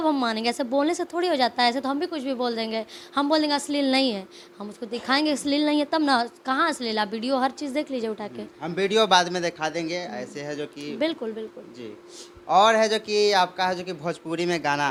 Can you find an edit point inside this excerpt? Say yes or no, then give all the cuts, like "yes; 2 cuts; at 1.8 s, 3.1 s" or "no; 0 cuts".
no; 0 cuts